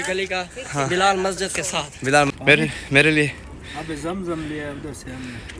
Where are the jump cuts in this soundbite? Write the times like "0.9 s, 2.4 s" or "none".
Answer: 2.3 s